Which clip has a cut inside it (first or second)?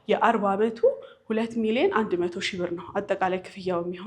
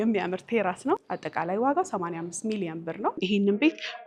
second